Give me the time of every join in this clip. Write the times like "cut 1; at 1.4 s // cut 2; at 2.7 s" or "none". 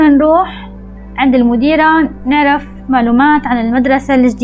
none